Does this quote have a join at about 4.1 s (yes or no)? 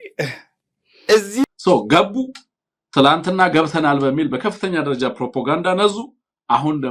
no